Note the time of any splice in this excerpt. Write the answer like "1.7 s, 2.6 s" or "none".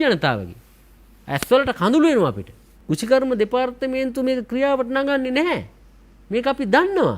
2.7 s